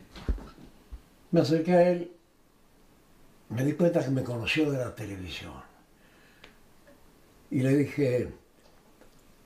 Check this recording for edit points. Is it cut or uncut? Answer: uncut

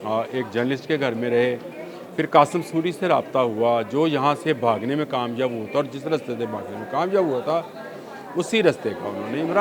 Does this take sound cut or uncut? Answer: uncut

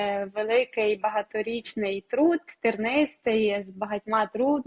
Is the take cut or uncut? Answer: uncut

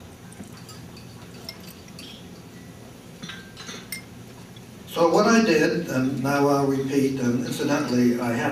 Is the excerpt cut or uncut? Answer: uncut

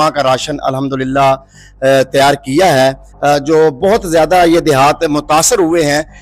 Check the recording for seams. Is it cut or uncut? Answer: cut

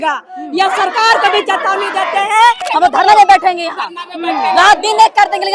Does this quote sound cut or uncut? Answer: cut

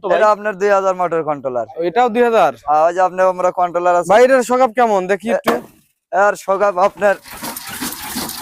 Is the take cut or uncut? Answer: uncut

